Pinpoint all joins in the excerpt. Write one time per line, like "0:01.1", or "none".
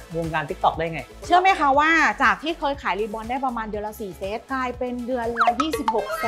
0:01.0